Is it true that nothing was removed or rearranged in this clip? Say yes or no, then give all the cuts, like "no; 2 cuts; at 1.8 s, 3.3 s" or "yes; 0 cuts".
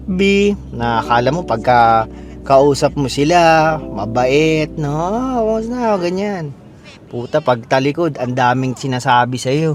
yes; 0 cuts